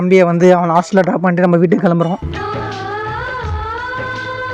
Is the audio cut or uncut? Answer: uncut